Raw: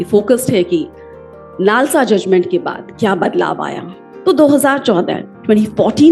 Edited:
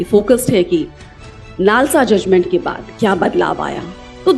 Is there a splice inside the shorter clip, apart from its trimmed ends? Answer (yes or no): no